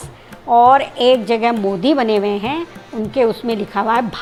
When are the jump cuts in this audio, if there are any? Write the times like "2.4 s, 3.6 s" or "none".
none